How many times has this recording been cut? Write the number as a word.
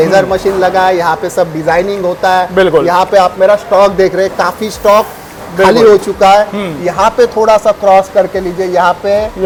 zero